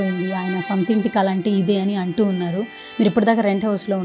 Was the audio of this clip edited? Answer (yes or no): no